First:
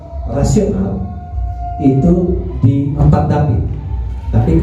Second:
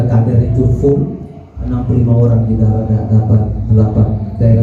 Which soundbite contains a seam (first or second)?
first